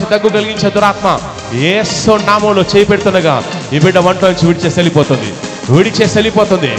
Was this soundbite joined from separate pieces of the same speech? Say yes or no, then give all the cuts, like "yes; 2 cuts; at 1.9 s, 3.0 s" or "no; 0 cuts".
no; 0 cuts